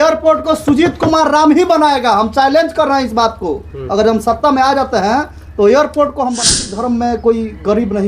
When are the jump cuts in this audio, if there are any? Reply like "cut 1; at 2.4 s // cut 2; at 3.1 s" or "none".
cut 1; at 6.5 s

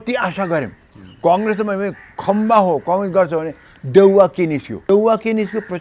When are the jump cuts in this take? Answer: cut 1; at 4.9 s

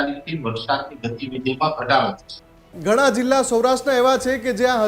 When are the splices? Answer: cut 1; at 2.6 s

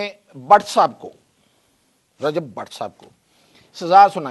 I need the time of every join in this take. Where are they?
none

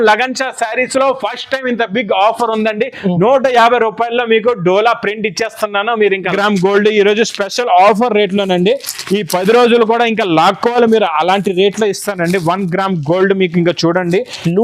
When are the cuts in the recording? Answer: cut 1; at 6.3 s

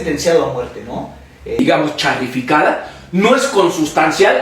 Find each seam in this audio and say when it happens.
cut 1; at 1.6 s

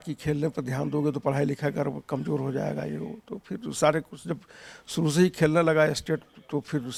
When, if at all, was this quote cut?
none

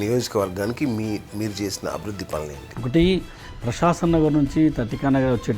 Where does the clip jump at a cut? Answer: cut 1; at 2.6 s

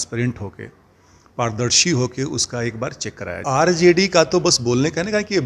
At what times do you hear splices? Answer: cut 1; at 3.4 s

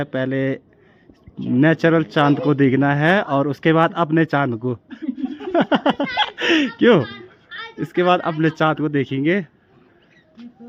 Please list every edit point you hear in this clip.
none

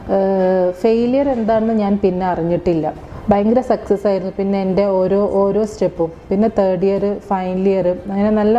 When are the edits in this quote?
cut 1; at 3.0 s

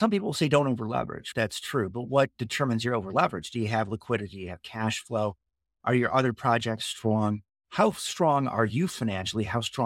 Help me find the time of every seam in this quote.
cut 1; at 1.3 s

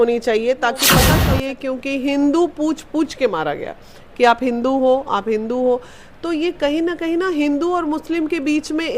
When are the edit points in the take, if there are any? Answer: cut 1; at 1.1 s

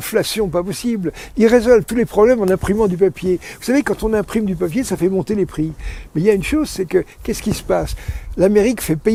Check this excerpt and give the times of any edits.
none

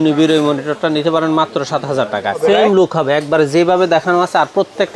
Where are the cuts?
cut 1; at 2.4 s

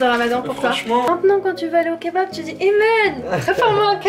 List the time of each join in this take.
cut 1; at 1.1 s

